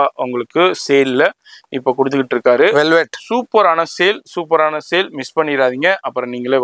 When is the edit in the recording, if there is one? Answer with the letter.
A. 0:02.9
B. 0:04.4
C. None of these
C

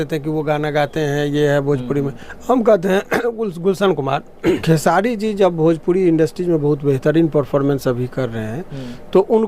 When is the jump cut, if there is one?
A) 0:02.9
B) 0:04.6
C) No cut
B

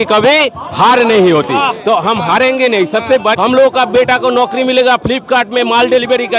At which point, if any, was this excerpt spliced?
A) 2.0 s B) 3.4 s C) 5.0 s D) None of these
B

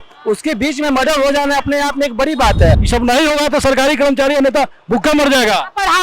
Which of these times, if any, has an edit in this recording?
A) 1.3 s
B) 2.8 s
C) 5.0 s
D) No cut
B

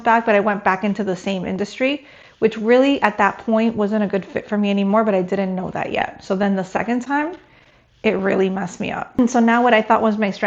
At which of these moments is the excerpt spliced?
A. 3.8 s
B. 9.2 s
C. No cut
B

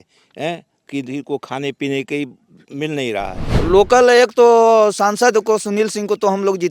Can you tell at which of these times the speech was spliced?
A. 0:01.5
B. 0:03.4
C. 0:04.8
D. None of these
B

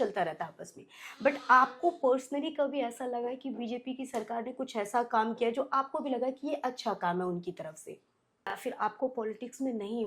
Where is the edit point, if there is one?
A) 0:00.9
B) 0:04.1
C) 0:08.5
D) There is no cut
C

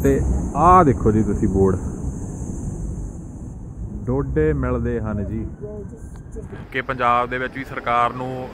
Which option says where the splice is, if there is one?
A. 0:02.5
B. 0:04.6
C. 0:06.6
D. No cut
C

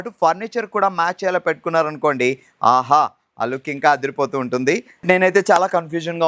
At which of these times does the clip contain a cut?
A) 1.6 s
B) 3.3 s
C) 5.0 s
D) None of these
C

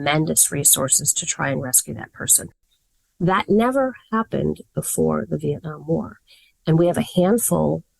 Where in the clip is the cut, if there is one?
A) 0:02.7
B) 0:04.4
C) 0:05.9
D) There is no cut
A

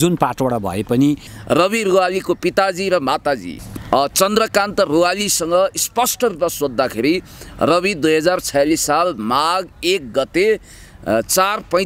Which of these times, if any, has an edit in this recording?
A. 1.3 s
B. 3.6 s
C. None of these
A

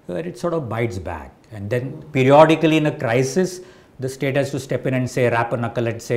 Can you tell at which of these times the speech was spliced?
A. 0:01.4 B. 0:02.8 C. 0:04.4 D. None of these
D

